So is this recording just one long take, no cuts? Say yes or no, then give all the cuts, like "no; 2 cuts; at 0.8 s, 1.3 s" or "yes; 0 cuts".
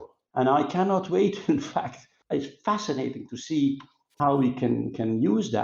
no; 1 cut; at 2.3 s